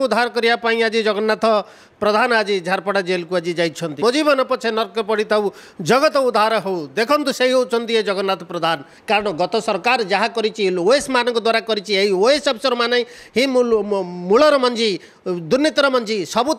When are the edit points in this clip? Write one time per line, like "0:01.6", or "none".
0:04.0
0:08.9

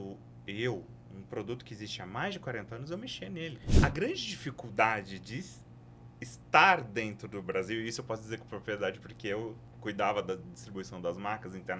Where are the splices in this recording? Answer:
0:03.7
0:09.7

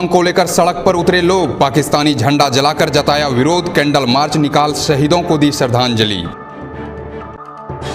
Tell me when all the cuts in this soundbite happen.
none

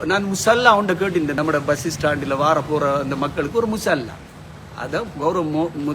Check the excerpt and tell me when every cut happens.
0:01.4

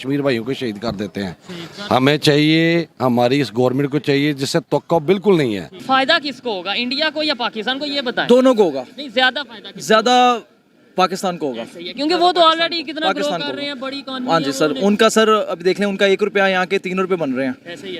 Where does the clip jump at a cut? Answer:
0:05.8

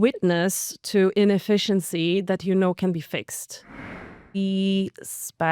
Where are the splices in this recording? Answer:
0:03.8

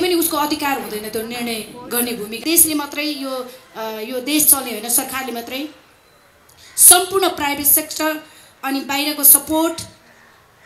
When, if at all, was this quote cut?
0:02.4

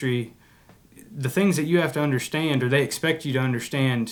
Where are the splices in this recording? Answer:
none

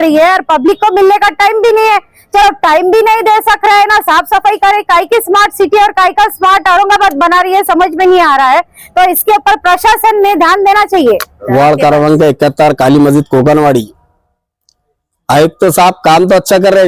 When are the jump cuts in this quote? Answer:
none

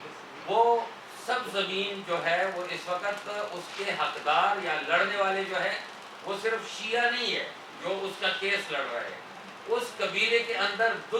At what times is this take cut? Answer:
none

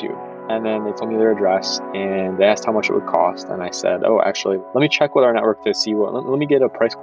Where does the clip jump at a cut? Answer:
0:04.6

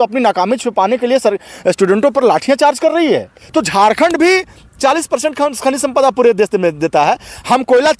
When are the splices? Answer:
0:03.4

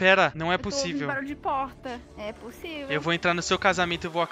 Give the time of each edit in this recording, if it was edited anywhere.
none

